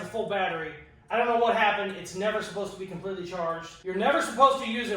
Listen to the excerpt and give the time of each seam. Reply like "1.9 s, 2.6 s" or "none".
3.7 s